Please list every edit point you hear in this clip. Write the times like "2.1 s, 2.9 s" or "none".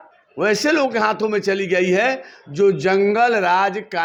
none

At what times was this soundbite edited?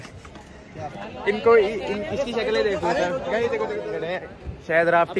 3.8 s

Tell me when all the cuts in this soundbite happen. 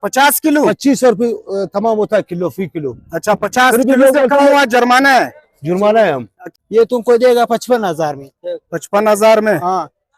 6.4 s

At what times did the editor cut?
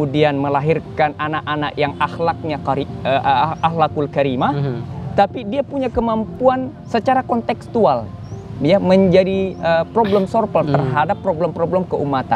none

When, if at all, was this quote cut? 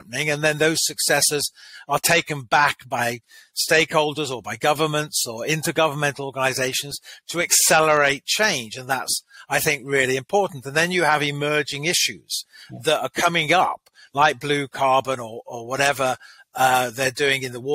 none

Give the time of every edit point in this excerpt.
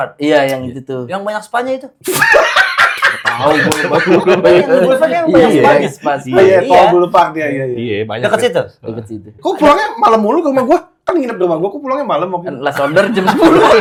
none

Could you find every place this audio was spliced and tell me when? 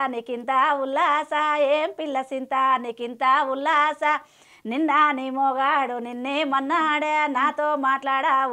none

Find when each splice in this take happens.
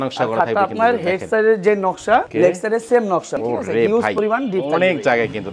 2.3 s, 3.4 s

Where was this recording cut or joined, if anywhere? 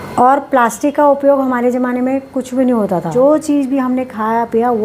3.1 s

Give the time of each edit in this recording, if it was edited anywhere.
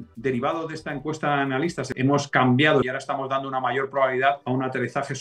1.8 s, 2.8 s, 4.4 s

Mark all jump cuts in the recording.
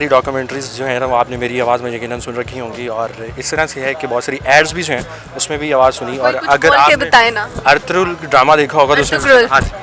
none

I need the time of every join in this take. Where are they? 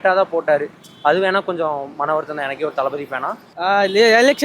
3.4 s

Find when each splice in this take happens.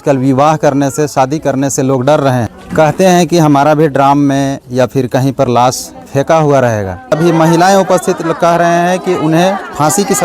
2.6 s, 7.1 s

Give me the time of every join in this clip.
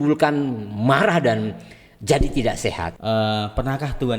2.9 s

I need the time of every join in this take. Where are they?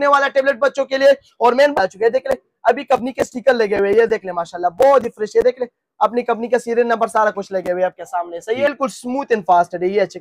1.7 s, 8.7 s

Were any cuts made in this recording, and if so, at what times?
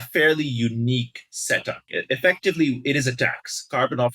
1.9 s

